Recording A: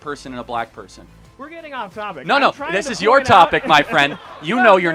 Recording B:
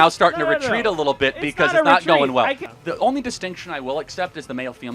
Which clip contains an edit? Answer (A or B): B